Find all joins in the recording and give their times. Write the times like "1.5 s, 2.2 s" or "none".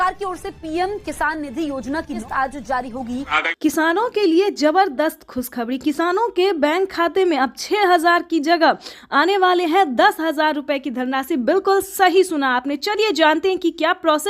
3.4 s